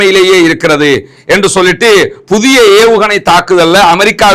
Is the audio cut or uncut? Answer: uncut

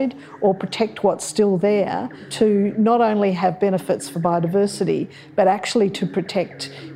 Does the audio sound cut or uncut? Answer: cut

